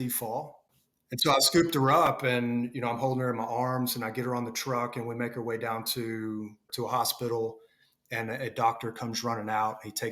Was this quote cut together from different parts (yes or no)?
yes